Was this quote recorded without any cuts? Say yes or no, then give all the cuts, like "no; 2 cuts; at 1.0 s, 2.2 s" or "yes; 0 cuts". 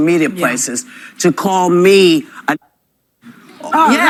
yes; 0 cuts